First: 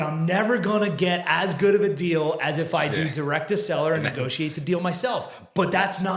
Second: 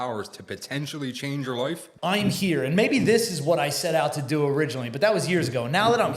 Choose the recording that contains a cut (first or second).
second